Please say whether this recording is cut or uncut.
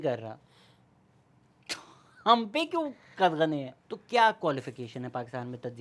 cut